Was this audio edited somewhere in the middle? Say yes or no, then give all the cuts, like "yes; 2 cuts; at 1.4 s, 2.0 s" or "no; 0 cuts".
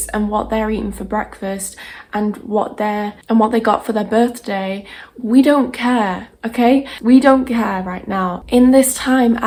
no; 0 cuts